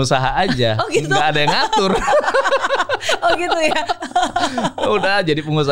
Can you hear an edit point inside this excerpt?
no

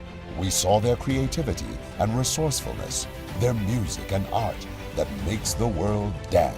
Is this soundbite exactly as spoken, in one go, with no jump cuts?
no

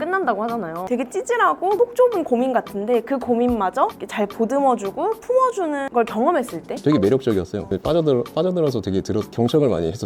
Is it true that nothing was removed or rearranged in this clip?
no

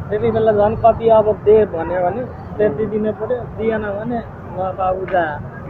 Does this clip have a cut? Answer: no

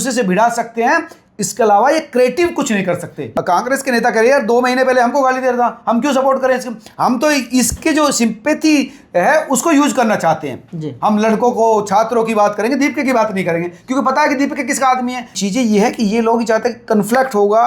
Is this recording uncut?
no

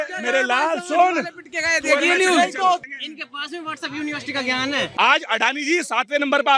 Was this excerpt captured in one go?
no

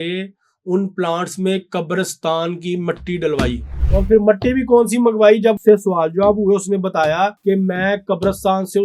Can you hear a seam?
yes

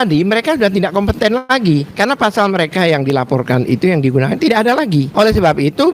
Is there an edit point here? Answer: yes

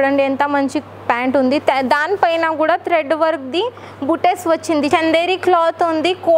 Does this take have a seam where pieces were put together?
yes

